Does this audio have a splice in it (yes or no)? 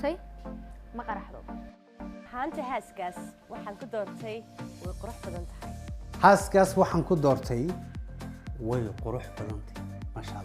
no